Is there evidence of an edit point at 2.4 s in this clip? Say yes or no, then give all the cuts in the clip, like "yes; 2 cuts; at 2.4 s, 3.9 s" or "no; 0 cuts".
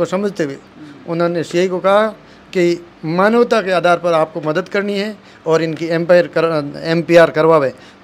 no; 0 cuts